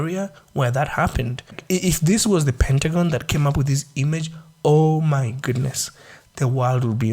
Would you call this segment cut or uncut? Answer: cut